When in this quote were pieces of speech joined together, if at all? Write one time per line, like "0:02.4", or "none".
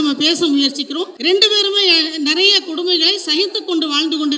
0:01.1